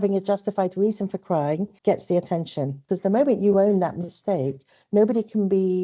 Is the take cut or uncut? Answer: cut